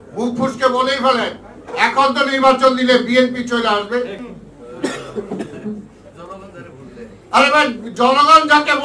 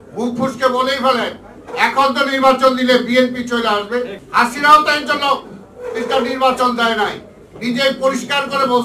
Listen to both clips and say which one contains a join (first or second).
second